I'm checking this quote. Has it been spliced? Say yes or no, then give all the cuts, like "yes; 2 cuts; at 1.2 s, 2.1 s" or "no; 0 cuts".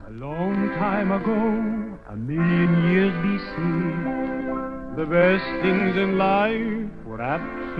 no; 0 cuts